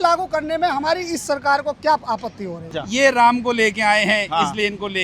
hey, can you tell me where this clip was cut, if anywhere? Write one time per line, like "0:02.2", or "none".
0:02.7